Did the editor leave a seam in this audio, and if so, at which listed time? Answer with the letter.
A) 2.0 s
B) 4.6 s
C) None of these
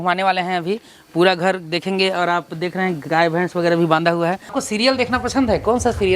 B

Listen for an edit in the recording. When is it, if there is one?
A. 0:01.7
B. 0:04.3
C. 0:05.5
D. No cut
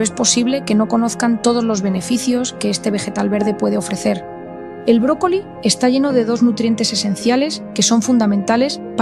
D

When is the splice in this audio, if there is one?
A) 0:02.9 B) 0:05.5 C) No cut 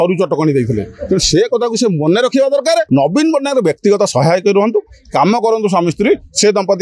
A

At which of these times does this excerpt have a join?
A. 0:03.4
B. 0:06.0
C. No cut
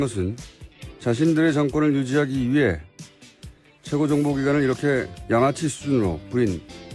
B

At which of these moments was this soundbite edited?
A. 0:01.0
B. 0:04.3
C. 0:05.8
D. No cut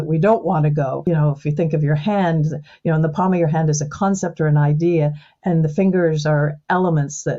A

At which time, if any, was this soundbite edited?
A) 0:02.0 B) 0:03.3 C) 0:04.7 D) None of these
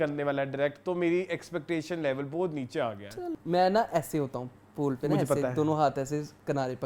B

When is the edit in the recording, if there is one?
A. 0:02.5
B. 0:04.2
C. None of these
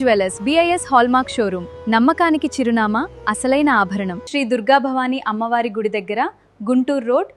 B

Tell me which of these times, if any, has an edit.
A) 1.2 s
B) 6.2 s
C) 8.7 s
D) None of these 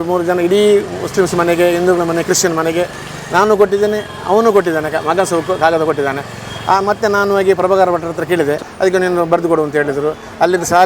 C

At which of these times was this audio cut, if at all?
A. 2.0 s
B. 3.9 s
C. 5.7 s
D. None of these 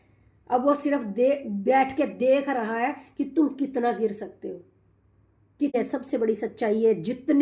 C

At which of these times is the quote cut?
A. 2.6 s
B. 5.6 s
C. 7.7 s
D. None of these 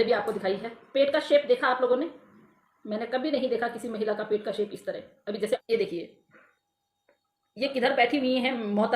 B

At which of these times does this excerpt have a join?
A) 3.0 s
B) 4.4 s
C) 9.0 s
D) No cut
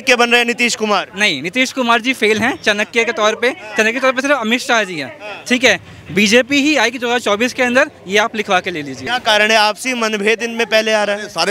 C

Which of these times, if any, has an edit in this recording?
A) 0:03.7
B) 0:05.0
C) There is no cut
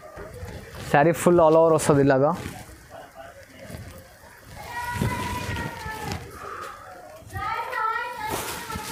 C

